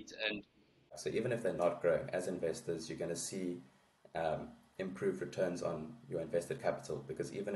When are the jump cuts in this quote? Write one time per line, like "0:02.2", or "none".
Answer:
0:01.0